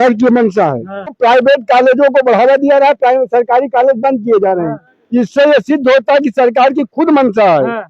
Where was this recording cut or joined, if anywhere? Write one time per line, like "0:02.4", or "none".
0:01.2